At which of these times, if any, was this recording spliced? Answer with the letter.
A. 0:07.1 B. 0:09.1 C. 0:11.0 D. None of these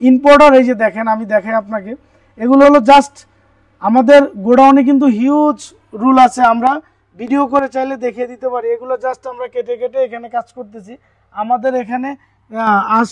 D